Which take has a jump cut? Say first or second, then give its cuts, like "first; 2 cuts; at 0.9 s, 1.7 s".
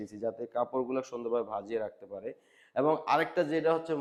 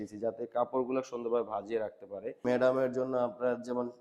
second; 1 cut; at 2.4 s